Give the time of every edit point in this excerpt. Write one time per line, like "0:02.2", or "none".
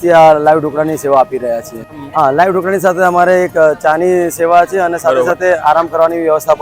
0:01.8